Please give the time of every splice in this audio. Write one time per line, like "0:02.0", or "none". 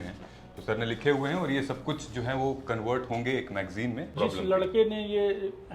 0:04.1